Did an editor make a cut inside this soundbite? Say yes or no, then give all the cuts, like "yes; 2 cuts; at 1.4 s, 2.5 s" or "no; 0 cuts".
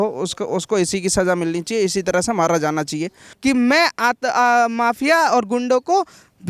yes; 1 cut; at 3.3 s